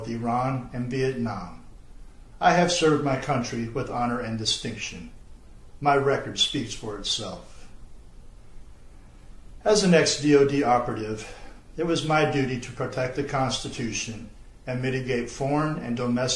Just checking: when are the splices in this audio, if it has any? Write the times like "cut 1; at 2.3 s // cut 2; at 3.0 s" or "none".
cut 1; at 13.7 s

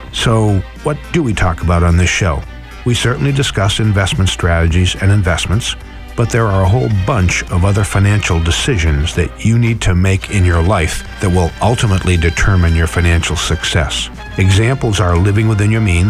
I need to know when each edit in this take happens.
none

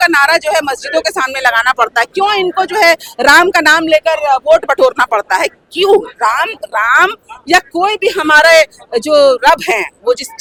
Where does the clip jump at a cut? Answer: none

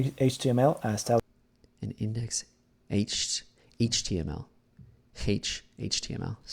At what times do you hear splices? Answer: none

